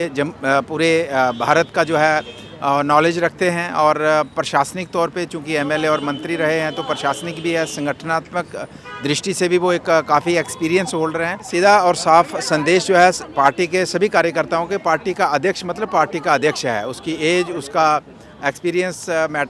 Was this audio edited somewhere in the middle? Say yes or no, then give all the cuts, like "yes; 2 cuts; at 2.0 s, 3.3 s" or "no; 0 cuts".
yes; 1 cut; at 11.5 s